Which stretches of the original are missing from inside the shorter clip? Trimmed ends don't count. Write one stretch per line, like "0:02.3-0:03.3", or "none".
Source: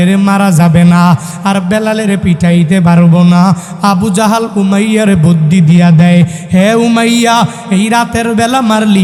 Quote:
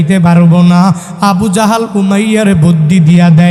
none

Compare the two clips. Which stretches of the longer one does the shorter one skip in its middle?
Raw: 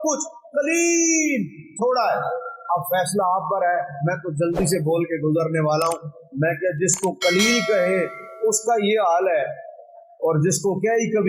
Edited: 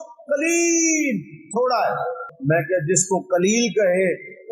0:02.5-0:06.2

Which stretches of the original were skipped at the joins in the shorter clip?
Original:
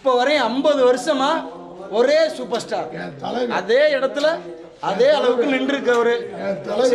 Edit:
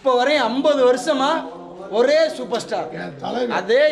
none

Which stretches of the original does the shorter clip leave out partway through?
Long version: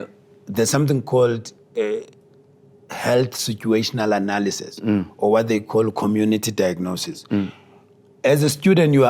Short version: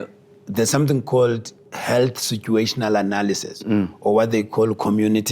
0:01.5-0:02.7

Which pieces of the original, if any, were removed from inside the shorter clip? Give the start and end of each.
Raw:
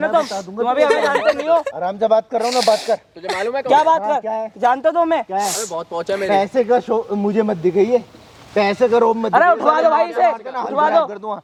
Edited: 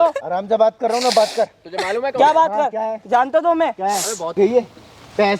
0:05.9-0:07.7

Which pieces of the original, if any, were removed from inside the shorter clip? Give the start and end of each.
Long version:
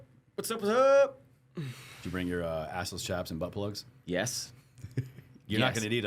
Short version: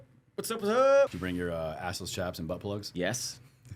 0:01.1-0:02.1
0:03.8-0:04.0

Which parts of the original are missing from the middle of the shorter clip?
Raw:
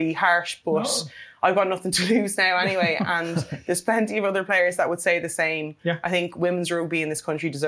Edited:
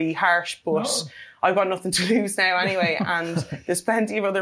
none

